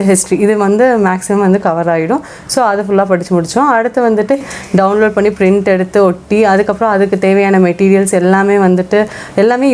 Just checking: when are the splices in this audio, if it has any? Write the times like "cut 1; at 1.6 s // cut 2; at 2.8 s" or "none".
cut 1; at 4.4 s

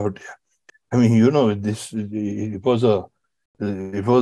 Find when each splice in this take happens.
none

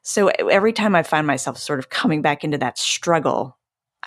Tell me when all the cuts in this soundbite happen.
none

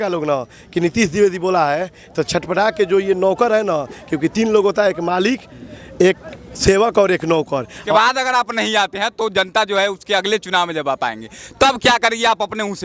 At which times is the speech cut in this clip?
cut 1; at 7.9 s

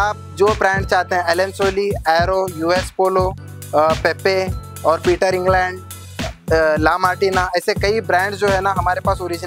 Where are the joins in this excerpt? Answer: none

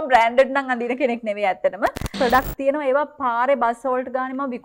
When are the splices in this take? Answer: cut 1; at 2.1 s

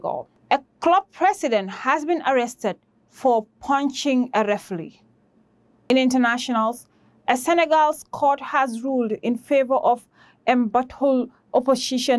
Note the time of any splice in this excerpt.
cut 1; at 5.9 s

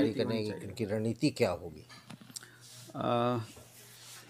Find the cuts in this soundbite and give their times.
none

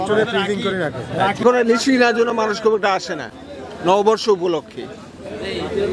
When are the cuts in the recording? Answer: cut 1; at 1.4 s

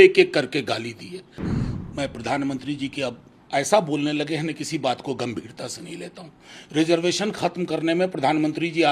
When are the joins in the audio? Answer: cut 1; at 1.5 s

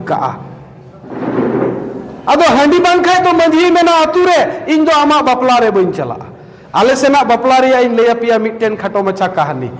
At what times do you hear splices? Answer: none

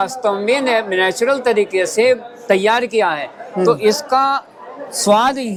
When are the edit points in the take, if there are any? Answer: none

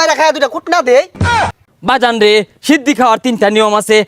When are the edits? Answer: cut 1; at 1.4 s

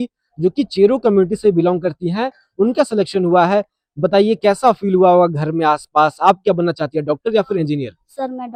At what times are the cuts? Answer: none

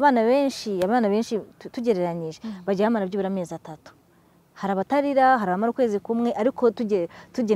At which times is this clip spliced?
none

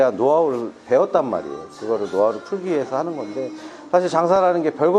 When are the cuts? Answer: none

